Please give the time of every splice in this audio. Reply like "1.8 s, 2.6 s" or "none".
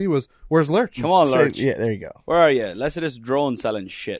1.0 s